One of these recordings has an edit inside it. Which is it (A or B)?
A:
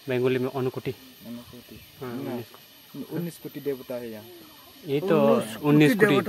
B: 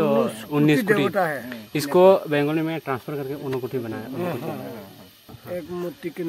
B